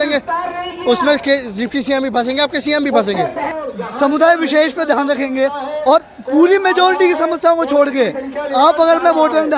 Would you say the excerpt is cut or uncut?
cut